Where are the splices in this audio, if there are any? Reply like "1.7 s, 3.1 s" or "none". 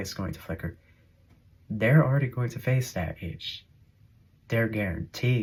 none